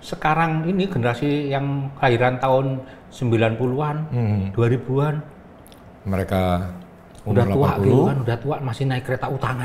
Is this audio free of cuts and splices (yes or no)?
yes